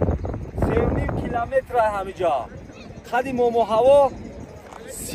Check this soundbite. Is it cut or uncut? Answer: uncut